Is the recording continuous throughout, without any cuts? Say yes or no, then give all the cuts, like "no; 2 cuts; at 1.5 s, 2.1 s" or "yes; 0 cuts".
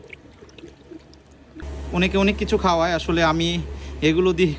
no; 1 cut; at 1.6 s